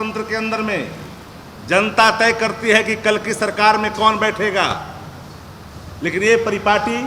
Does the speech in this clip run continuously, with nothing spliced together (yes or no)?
yes